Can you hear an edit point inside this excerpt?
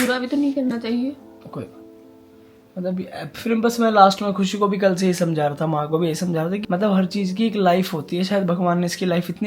no; 0 cuts

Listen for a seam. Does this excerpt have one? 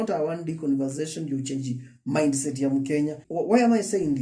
yes; 1 cut; at 3.2 s

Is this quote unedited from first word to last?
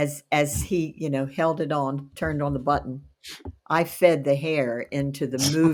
yes; 0 cuts

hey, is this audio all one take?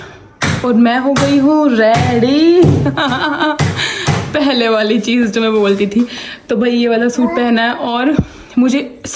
yes; 0 cuts

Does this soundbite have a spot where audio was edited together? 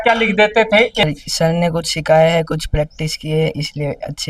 yes; 1 cut; at 1.0 s

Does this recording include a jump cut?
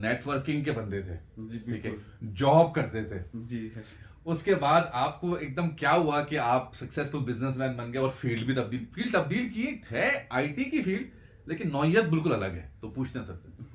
no; 0 cuts

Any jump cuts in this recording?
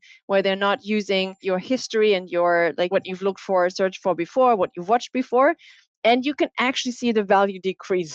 yes; 2 cuts; at 1.4 s, 2.9 s

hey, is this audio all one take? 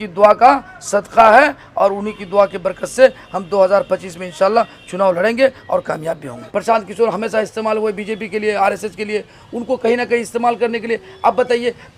no; 1 cut; at 6.5 s

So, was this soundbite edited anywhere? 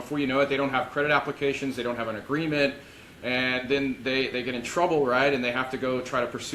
no; 0 cuts

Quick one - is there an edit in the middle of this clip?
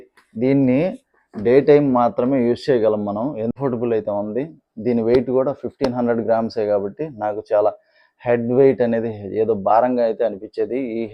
yes; 1 cut; at 3.5 s

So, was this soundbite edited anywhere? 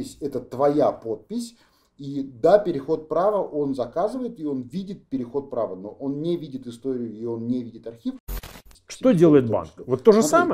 yes; 1 cut; at 8.4 s

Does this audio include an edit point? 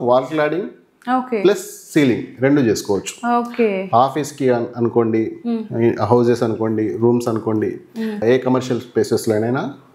no; 0 cuts

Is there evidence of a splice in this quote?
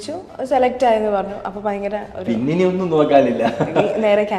no; 0 cuts

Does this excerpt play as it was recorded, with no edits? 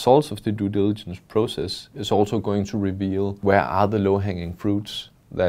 no; 1 cut; at 3.3 s

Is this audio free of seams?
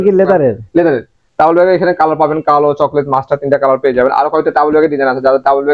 yes; 0 cuts

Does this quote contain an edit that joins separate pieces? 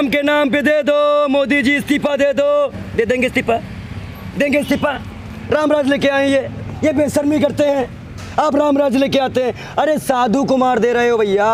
no; 0 cuts

